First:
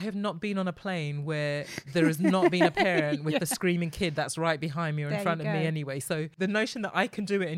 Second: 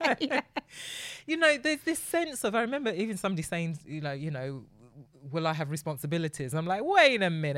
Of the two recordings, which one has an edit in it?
first; 1 cut; at 6.3 s

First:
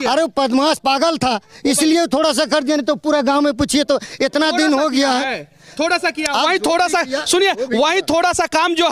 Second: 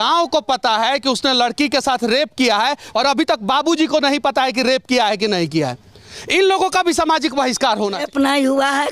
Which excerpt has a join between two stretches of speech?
second; 2 cuts; at 2.9 s, 8.0 s

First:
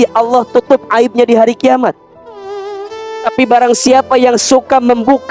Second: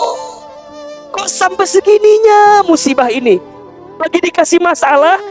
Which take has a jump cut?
second; 1 cut; at 3.6 s

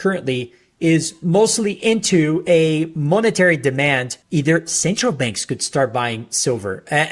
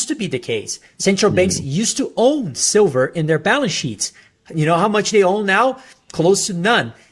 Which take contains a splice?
first; 1 cut; at 4.2 s

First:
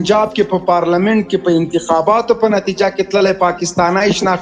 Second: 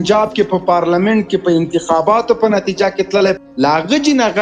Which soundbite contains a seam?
second; 1 cut; at 3.4 s

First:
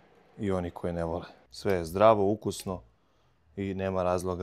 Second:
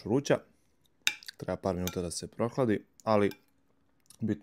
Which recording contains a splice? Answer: first; 1 cut; at 1.4 s

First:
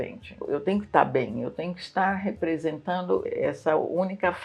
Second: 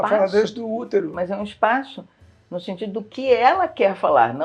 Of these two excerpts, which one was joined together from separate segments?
second; 1 cut; at 1.1 s

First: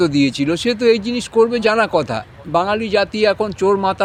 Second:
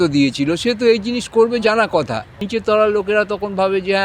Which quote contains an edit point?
second; 1 cut; at 2.4 s

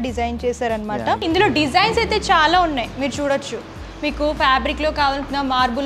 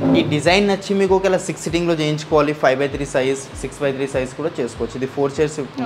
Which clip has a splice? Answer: first; 1 cut; at 1.2 s

